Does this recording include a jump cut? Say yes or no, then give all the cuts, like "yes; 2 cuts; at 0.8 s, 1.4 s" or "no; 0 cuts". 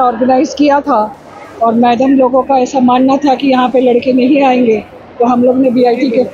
no; 0 cuts